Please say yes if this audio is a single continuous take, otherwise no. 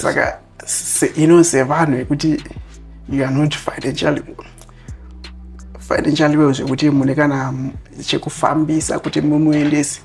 yes